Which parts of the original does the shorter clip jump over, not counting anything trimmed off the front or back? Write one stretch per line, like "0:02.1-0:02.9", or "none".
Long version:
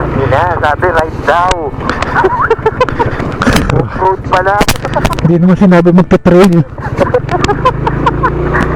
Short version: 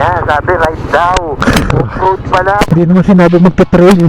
0:01.7-0:03.4
0:04.7-0:05.2